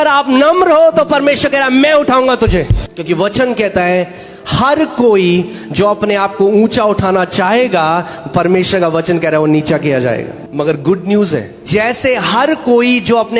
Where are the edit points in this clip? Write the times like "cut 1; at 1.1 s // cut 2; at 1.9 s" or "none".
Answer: cut 1; at 2.8 s // cut 2; at 10.3 s // cut 3; at 11.6 s